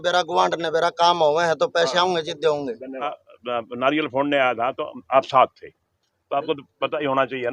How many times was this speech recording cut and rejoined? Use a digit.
1